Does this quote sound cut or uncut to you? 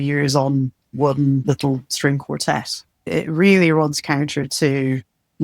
cut